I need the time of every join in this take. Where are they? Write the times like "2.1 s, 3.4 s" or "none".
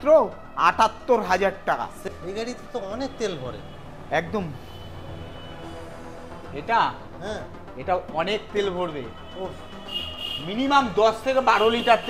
2.0 s